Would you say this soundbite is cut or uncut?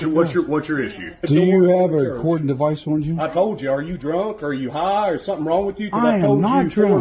cut